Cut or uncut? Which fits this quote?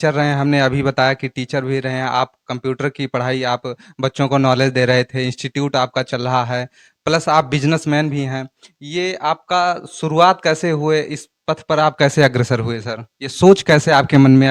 uncut